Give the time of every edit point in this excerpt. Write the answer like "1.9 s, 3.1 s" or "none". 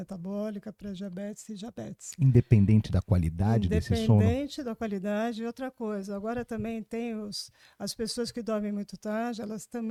none